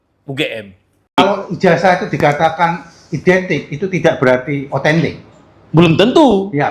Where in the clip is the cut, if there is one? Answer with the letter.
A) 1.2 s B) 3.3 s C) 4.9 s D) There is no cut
A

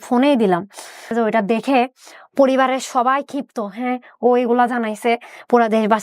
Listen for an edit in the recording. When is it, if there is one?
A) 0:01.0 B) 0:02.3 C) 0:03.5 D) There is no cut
A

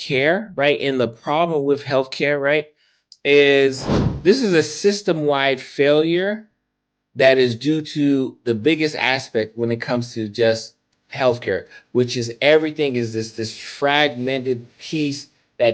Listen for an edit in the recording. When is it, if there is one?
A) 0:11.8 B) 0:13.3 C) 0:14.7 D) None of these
D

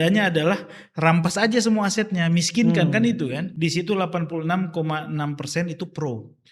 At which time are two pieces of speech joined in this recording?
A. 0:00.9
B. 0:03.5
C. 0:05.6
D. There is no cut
B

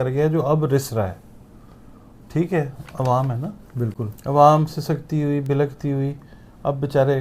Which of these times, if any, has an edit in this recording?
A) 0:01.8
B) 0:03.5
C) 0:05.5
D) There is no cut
D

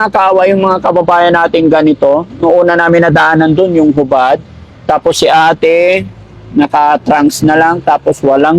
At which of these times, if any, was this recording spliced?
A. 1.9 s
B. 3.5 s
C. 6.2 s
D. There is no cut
D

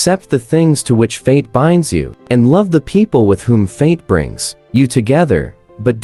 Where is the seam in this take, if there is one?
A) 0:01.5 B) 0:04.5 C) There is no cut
C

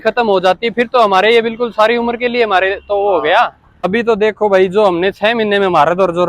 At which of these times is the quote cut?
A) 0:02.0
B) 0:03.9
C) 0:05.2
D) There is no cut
B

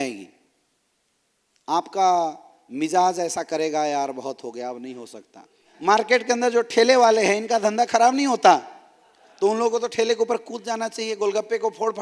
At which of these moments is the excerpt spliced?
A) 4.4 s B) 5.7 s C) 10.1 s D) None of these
B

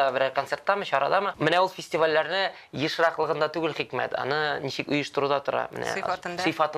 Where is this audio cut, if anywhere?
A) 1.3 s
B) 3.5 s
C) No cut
A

